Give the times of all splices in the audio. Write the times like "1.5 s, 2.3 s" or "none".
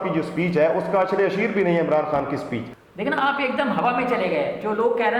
2.7 s